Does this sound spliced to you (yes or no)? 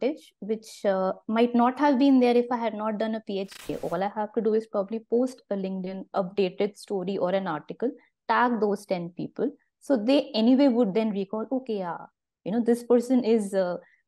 yes